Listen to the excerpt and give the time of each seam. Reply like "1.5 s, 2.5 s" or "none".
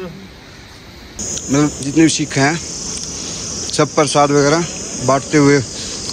1.1 s

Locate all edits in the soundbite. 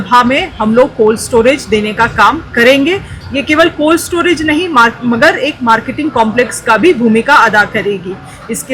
none

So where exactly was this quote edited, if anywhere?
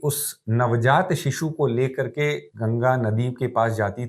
2.5 s

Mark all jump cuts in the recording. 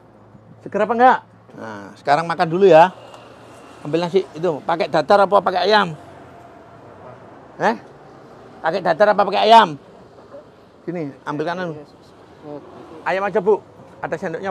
none

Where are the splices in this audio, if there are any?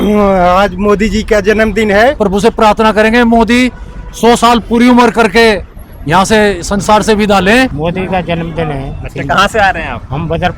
2.2 s, 7.8 s

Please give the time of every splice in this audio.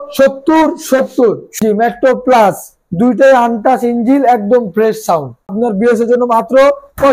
1.5 s, 5.5 s

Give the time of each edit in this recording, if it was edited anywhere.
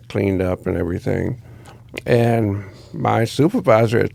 none

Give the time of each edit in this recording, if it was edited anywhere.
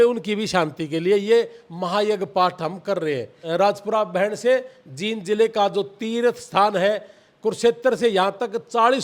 3.3 s

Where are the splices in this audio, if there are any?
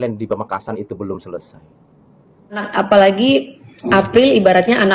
2.7 s

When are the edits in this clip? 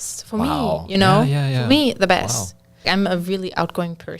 2.9 s

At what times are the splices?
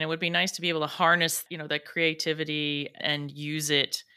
1.4 s, 3.0 s

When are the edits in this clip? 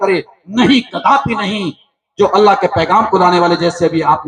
none

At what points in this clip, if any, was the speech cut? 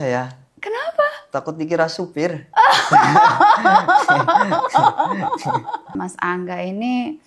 5.9 s

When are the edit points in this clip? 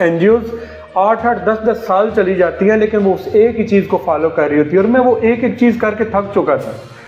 none

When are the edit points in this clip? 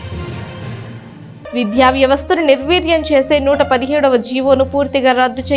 1.5 s

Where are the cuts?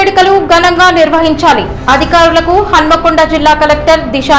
none

